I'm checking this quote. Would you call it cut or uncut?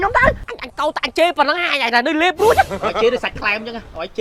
uncut